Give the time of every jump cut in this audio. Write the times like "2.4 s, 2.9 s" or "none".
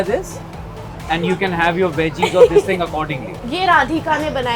3.4 s